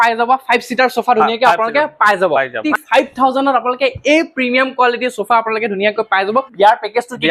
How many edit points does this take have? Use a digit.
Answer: 2